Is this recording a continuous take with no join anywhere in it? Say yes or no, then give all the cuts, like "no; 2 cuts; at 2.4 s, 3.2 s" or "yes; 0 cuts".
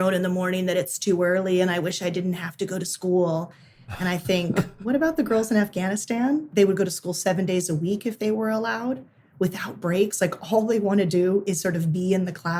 no; 1 cut; at 6.5 s